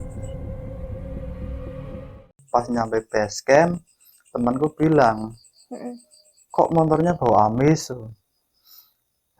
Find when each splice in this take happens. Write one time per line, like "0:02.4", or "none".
0:02.2